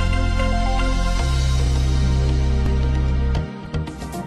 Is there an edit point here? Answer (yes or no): no